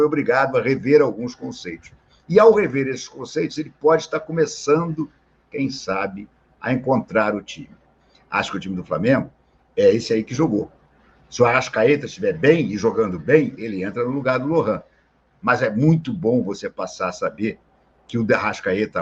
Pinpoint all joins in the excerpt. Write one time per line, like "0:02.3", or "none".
none